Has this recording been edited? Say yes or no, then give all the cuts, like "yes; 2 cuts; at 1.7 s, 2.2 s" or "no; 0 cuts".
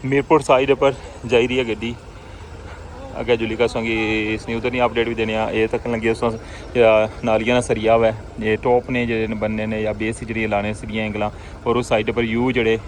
no; 0 cuts